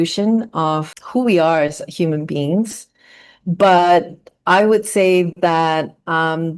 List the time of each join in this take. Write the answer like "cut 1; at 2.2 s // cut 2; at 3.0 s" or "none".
cut 1; at 1.0 s